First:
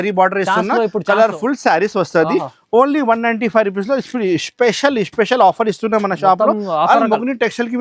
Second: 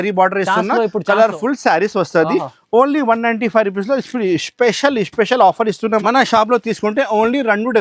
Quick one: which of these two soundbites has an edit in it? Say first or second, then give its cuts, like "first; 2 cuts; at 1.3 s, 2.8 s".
second; 1 cut; at 6.0 s